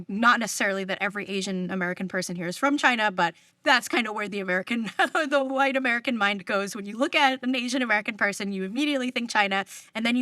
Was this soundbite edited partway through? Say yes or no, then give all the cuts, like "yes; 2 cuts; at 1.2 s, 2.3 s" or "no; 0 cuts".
yes; 1 cut; at 3.5 s